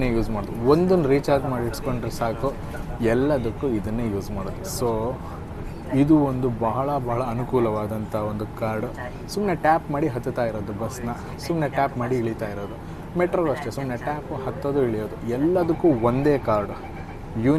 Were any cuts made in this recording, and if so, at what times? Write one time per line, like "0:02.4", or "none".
none